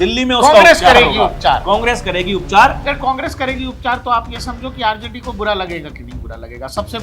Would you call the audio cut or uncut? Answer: cut